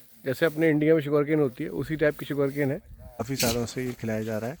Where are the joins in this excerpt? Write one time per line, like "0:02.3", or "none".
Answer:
0:03.2